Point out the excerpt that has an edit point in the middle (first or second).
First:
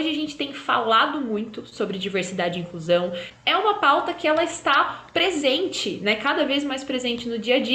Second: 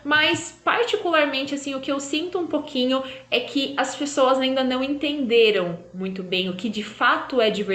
first